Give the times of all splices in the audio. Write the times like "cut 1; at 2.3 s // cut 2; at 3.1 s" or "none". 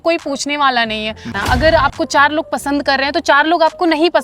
cut 1; at 1.3 s